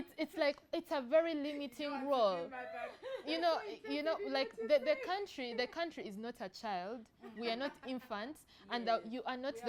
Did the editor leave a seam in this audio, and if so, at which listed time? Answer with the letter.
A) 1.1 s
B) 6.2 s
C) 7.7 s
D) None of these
D